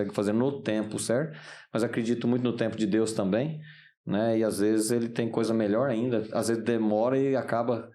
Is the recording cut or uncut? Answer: uncut